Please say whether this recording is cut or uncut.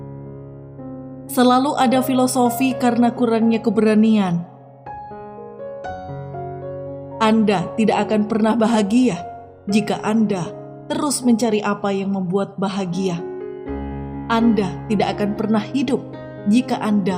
cut